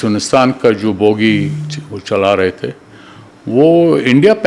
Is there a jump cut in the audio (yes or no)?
no